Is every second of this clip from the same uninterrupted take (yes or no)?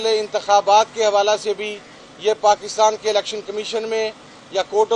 yes